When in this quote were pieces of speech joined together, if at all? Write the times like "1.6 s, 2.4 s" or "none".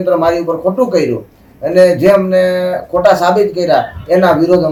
none